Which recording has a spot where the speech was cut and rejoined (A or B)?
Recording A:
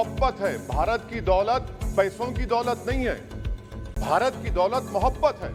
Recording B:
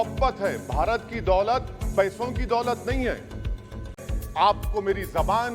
B